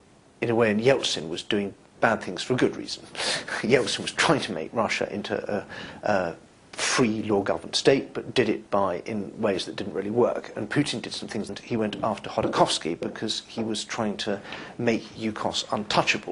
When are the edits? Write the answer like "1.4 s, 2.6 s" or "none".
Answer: none

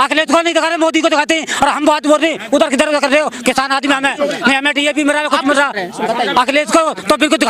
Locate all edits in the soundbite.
none

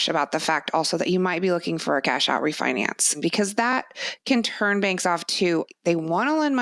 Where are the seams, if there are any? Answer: 3.2 s, 5.7 s

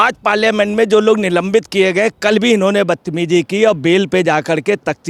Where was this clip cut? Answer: none

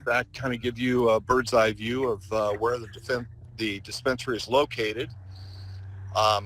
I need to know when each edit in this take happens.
4.4 s

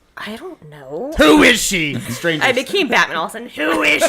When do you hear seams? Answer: 1.1 s, 2.1 s

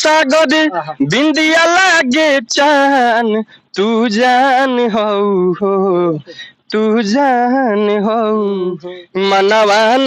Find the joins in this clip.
8.8 s

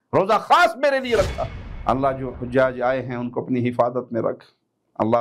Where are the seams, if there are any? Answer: 1.6 s

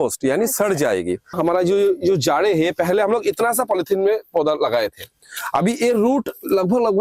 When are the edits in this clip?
1.3 s

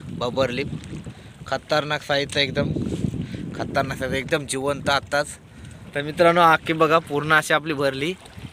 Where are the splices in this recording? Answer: 6.2 s

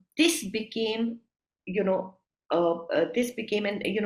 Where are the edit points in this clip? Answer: none

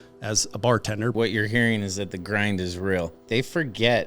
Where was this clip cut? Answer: 1.1 s, 3.2 s

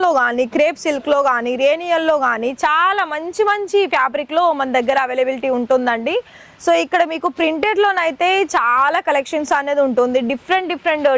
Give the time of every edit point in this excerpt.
none

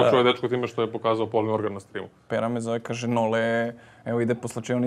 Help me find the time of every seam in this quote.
2.2 s

